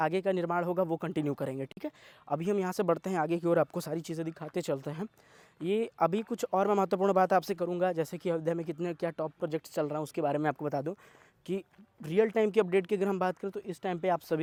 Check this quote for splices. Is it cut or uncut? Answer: uncut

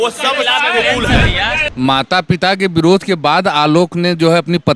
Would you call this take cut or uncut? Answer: cut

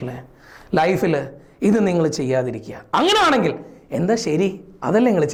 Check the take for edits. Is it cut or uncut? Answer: uncut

